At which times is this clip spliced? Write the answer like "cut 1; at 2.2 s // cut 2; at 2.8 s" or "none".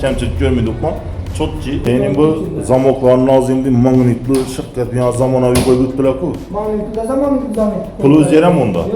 cut 1; at 1.8 s